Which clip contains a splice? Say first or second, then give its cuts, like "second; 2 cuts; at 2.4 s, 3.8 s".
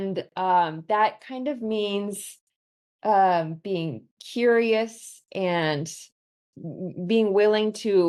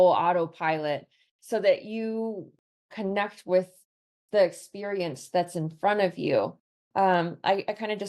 second; 1 cut; at 2.9 s